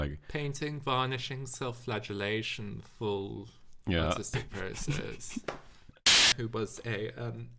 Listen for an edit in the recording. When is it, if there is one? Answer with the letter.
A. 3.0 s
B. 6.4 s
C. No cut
B